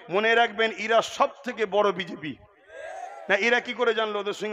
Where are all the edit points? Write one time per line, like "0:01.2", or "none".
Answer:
none